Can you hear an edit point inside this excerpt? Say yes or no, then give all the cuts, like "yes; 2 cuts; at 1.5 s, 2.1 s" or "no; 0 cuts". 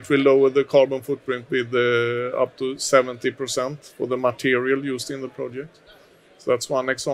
no; 0 cuts